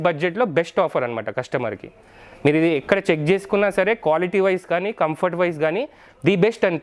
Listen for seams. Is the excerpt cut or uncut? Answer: uncut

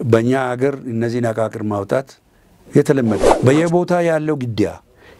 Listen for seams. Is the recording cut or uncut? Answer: cut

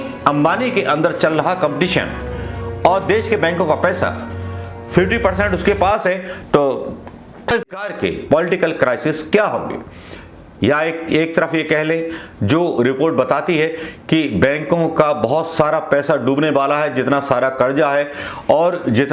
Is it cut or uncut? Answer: cut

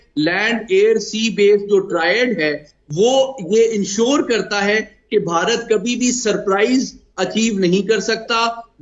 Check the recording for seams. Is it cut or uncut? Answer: uncut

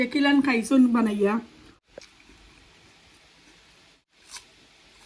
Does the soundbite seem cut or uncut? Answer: cut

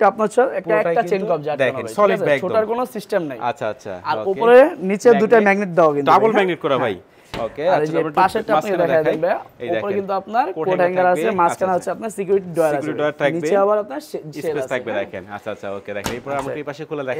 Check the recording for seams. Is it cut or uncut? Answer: uncut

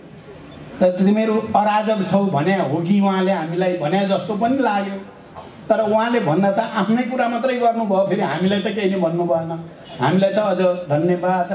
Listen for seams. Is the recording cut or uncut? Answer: uncut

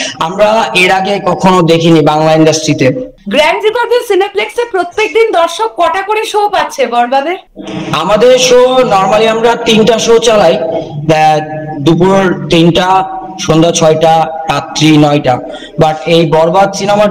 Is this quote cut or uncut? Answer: uncut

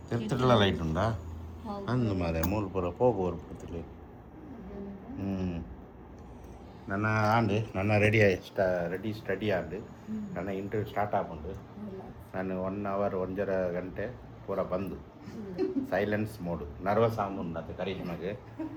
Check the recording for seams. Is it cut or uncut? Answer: uncut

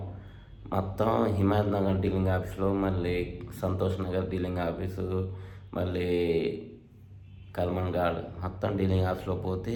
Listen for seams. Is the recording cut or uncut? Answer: uncut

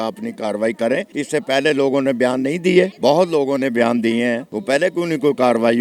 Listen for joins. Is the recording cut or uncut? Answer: cut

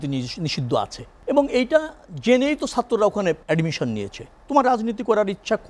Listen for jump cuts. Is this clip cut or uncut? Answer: cut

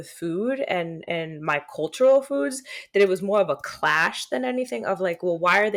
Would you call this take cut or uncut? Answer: uncut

